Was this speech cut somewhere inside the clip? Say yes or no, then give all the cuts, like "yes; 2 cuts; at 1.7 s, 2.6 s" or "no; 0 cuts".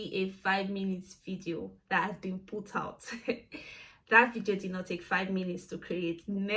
no; 0 cuts